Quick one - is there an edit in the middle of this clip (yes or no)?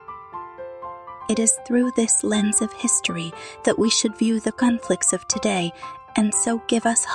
yes